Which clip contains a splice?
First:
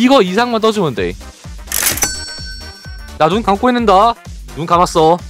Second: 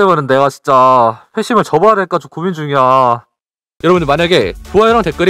second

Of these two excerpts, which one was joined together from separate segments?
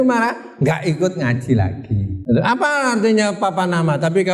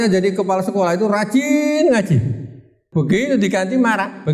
first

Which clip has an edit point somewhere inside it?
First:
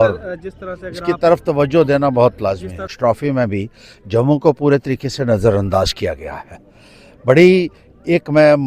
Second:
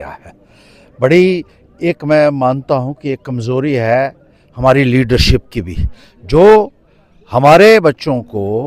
first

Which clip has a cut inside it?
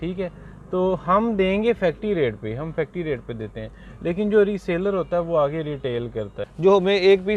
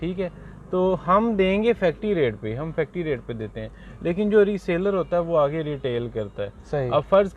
first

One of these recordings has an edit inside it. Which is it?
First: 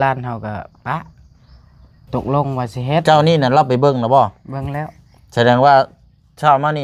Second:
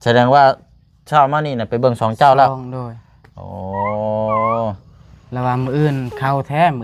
first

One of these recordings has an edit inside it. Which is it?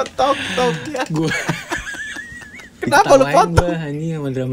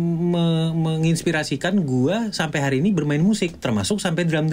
first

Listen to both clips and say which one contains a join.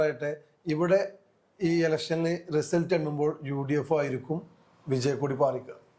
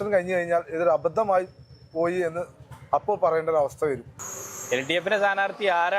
second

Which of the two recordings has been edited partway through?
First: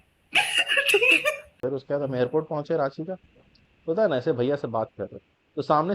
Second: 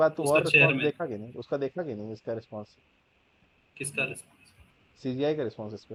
first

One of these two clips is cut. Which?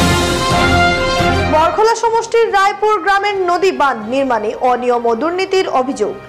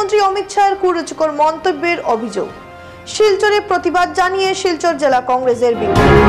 first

